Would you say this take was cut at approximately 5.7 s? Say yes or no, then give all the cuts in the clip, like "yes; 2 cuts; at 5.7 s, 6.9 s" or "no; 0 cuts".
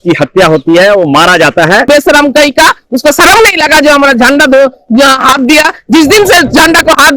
no; 1 cut; at 1.8 s